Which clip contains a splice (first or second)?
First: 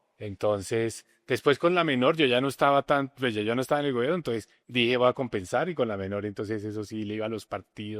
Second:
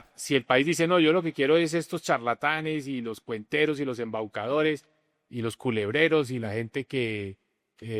first